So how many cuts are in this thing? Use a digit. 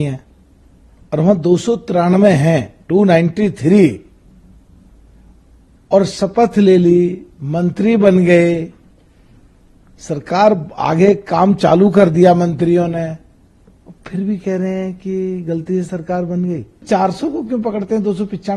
1